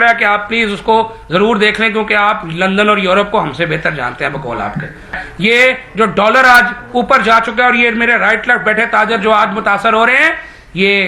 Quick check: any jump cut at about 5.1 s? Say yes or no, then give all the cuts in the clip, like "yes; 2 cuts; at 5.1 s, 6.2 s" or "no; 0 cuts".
yes; 1 cut; at 5.1 s